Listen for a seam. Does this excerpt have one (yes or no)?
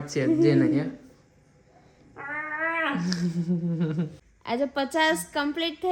yes